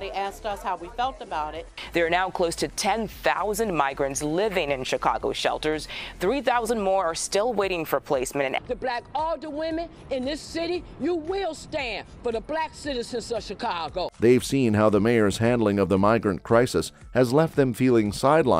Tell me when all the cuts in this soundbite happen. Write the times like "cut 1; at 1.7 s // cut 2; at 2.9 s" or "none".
none